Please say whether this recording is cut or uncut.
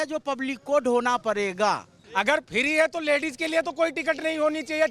cut